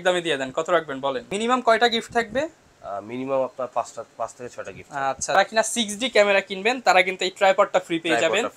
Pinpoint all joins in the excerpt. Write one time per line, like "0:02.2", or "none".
0:01.3
0:05.4